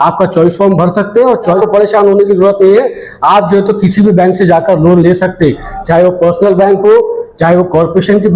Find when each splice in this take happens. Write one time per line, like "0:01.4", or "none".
0:01.6